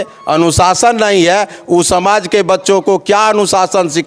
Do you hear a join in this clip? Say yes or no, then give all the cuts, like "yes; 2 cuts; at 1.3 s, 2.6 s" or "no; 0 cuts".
no; 0 cuts